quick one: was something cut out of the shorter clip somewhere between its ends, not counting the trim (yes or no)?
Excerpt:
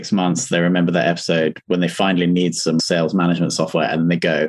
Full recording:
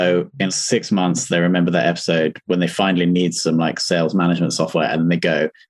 yes